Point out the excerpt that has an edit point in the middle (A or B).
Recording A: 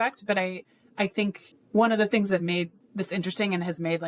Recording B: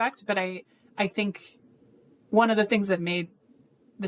A